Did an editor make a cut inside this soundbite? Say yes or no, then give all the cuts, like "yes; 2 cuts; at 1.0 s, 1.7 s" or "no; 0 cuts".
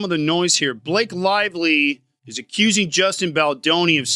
no; 0 cuts